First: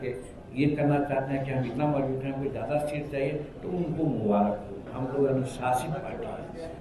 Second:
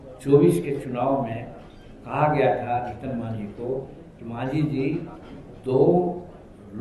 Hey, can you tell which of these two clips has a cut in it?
first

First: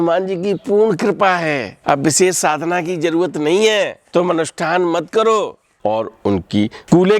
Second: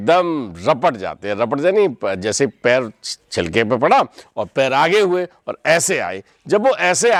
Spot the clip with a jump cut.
first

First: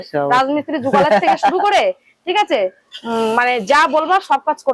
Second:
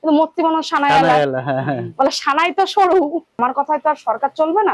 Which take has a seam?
second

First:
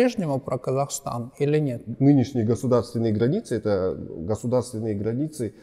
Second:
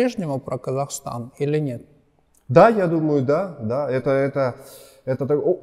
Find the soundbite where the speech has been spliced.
first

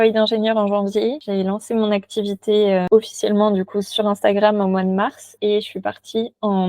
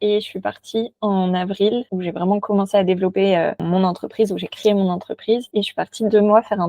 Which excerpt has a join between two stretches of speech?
first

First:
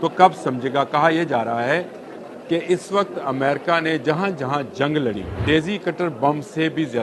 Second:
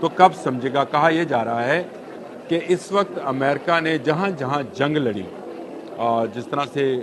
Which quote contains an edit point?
first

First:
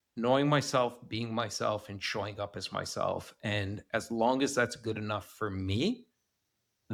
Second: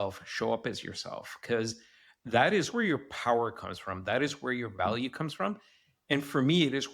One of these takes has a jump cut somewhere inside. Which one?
second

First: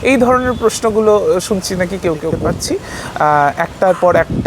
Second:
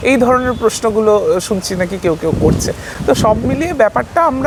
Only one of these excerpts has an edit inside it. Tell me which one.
first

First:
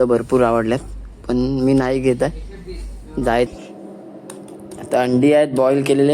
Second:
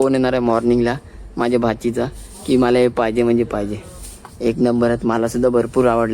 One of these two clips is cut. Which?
first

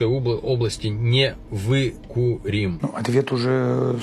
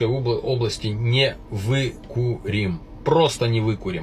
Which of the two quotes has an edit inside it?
first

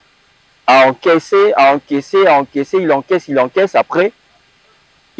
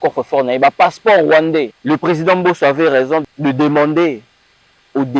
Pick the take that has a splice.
second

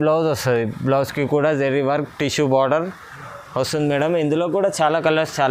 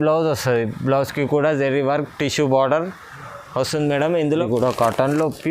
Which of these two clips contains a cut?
second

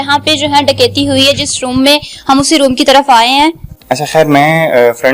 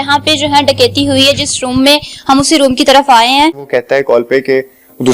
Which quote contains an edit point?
second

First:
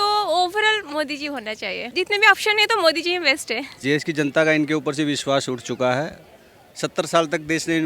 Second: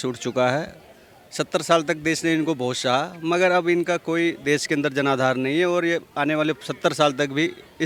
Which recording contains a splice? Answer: first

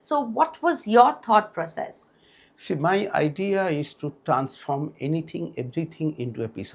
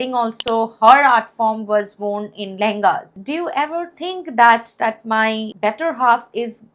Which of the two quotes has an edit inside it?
second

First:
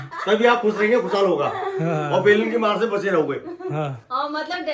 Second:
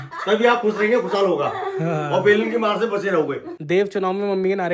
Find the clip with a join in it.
second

